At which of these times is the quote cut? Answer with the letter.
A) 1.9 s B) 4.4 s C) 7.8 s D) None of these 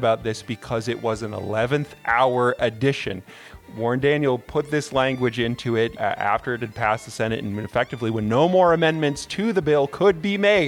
D